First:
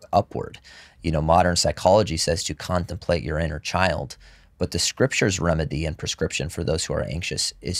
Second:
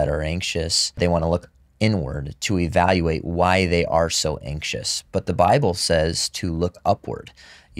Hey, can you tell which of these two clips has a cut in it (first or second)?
second